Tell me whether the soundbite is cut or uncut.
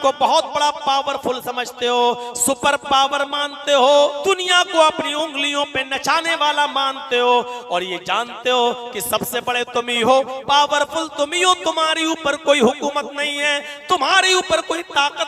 cut